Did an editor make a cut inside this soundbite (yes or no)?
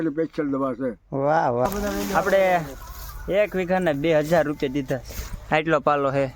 yes